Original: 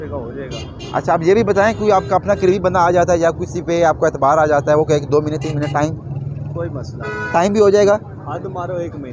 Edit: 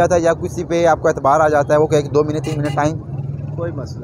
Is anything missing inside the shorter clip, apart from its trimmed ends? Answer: no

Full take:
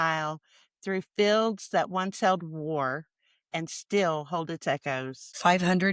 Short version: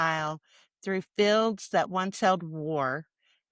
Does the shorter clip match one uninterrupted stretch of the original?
yes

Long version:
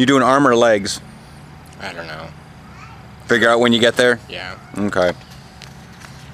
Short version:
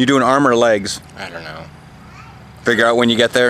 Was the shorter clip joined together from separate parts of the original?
yes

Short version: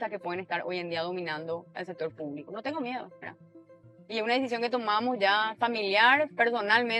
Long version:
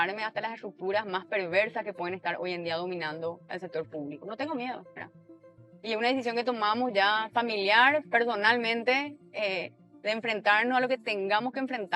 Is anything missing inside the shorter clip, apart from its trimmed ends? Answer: no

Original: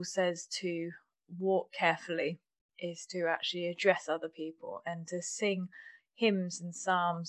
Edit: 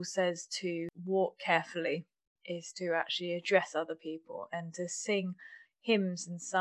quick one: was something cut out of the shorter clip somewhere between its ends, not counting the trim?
yes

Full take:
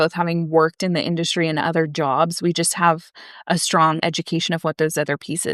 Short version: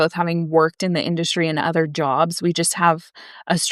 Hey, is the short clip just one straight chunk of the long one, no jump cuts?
yes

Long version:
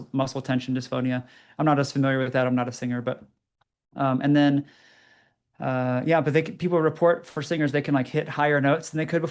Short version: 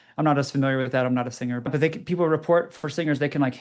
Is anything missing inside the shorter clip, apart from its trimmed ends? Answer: yes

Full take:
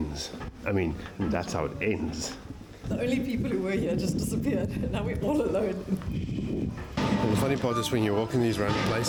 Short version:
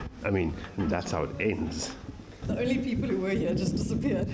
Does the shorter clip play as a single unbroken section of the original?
yes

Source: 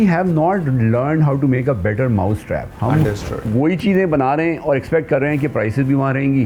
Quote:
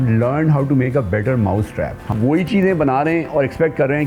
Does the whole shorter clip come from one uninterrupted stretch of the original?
no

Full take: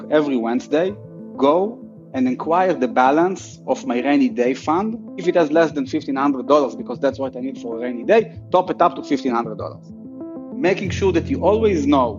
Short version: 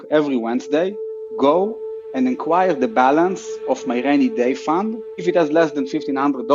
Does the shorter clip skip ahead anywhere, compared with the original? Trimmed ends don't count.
no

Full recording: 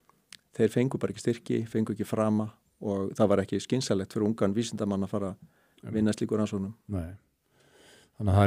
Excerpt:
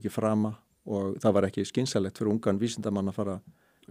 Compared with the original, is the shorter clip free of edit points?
yes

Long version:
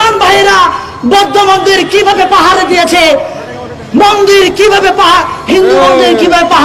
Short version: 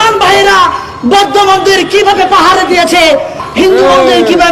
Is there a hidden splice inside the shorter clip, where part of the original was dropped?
yes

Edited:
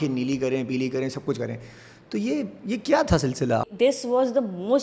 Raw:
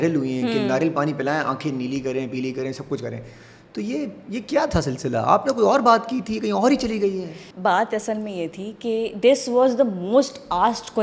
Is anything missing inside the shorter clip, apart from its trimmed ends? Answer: yes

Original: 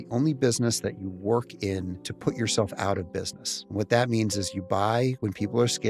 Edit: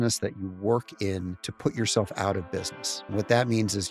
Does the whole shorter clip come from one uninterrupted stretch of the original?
yes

